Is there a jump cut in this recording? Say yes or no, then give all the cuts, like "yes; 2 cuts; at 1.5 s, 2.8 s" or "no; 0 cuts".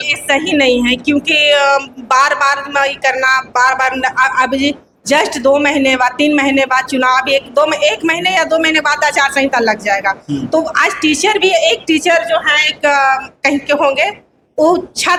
no; 0 cuts